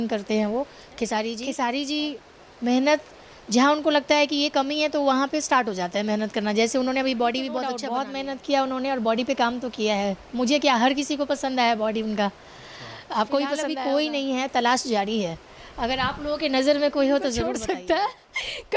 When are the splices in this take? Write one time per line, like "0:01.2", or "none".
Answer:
0:01.4
0:07.8
0:13.7
0:17.5